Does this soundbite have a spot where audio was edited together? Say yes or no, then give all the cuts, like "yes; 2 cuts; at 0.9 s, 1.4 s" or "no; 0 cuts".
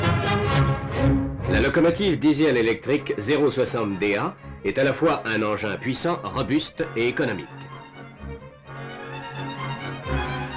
no; 0 cuts